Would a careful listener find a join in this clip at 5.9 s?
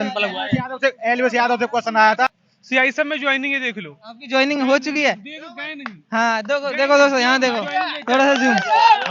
no; 1 cut; at 2.3 s

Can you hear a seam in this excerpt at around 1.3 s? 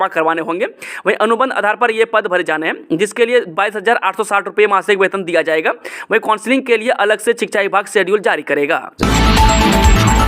no; 1 cut; at 8.9 s

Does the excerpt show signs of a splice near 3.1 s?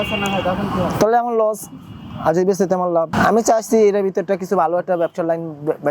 yes; 1 cut; at 3.1 s

